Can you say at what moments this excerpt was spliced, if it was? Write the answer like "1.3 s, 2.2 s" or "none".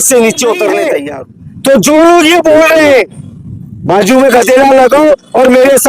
1.0 s